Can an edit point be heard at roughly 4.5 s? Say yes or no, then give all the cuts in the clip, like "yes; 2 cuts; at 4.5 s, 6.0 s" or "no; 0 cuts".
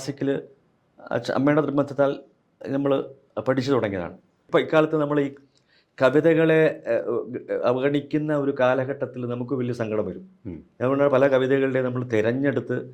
yes; 1 cut; at 4.5 s